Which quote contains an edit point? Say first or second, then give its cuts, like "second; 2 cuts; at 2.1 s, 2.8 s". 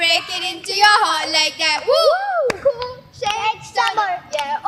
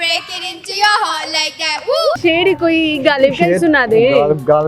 second; 1 cut; at 2.2 s